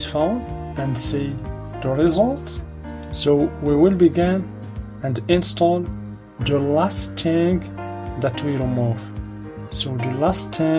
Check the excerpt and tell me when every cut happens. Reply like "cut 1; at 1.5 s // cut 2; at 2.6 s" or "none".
cut 1; at 1.5 s

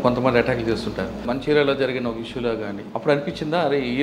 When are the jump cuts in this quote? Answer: cut 1; at 1.2 s // cut 2; at 2.8 s

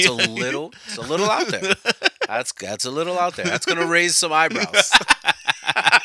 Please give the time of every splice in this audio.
none

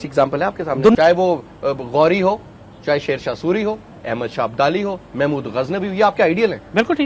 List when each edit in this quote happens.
cut 1; at 1.0 s

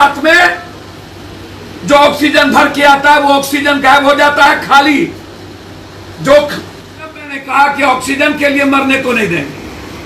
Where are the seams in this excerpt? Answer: cut 1; at 7.4 s

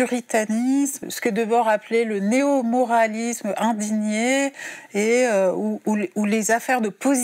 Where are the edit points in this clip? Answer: cut 1; at 1.0 s

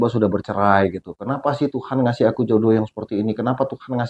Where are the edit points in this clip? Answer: none

